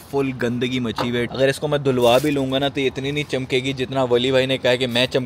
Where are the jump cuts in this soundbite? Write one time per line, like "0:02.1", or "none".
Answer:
none